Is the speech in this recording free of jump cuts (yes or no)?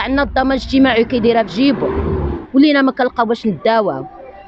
no